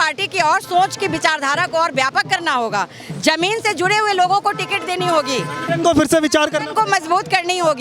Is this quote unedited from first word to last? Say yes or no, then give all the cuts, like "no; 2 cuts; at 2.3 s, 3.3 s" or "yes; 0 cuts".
yes; 0 cuts